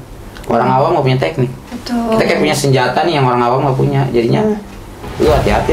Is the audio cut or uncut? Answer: uncut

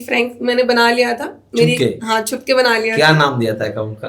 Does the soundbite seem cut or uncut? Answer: uncut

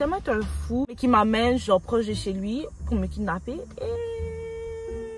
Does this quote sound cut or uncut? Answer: cut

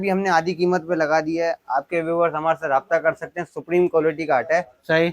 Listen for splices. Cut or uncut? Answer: uncut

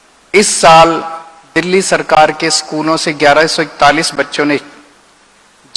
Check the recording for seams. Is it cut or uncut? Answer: uncut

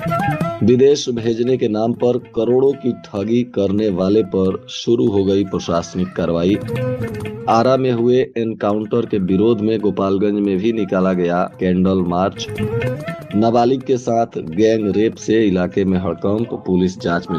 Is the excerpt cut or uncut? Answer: uncut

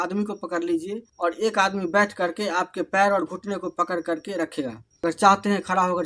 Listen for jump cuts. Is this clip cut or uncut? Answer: cut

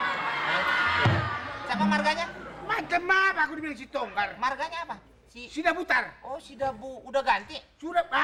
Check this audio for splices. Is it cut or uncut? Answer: uncut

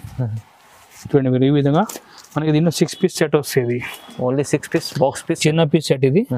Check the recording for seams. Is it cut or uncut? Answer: uncut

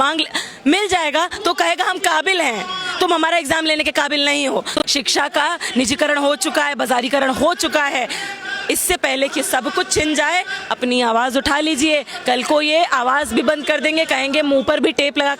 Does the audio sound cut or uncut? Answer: cut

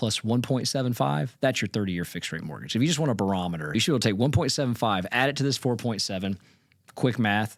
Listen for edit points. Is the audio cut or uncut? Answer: uncut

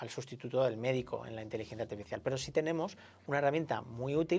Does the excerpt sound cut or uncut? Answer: uncut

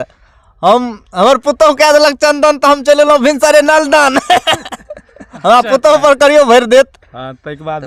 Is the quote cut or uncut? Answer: uncut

